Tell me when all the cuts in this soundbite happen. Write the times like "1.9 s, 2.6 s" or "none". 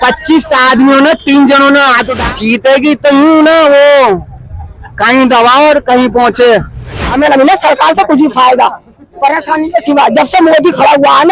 2.2 s, 7.0 s

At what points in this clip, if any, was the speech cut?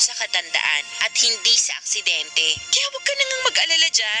0.9 s, 2.7 s

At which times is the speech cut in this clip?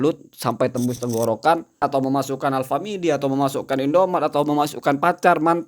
1.8 s

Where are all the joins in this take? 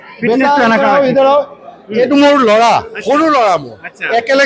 none

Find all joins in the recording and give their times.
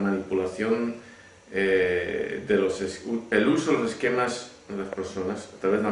none

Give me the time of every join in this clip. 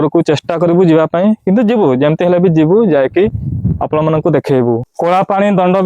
4.9 s

